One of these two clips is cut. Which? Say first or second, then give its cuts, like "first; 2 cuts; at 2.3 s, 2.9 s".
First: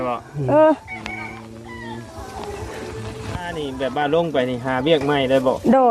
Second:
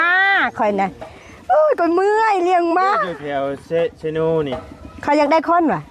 first; 1 cut; at 3.5 s